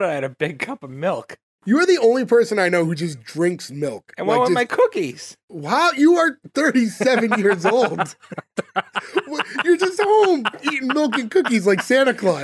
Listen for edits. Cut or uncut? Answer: cut